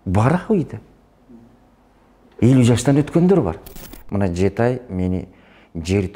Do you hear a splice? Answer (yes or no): yes